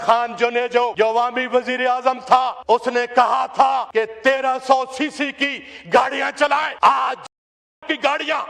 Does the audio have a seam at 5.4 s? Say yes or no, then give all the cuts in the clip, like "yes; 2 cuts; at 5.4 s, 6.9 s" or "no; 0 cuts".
no; 4 cuts; at 0.9 s, 2.6 s, 3.9 s, 6.7 s